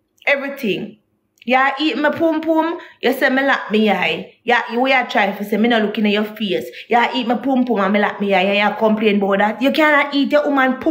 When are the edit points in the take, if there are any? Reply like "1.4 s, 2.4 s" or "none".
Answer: none